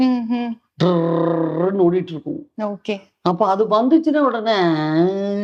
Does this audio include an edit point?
no; 0 cuts

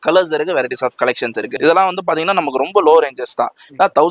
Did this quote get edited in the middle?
yes; 1 cut; at 1.5 s

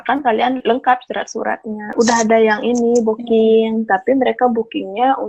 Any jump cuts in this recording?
yes; 1 cut; at 1.9 s

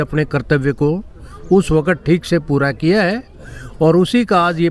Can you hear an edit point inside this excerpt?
no; 0 cuts

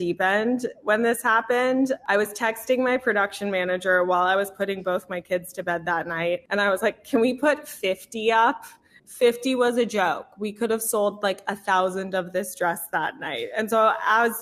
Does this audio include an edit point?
yes; 2 cuts; at 2.0 s, 6.5 s

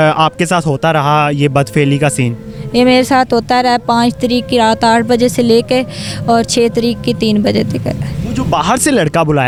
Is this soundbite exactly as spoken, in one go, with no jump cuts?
yes; 0 cuts

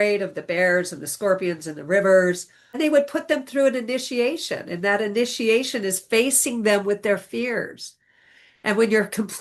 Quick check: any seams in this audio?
yes; 1 cut; at 2.8 s

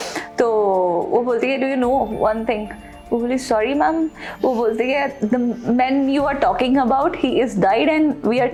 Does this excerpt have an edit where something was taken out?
no; 0 cuts

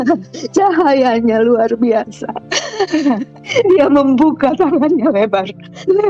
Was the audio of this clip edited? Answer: yes; 1 cut; at 3.5 s

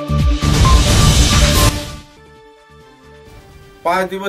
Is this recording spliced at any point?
yes; 2 cuts; at 1.7 s, 3.4 s

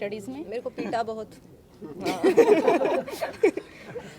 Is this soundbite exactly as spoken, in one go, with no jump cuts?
yes; 0 cuts

